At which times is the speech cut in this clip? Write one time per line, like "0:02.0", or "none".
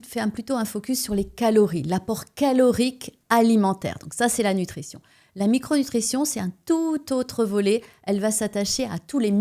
none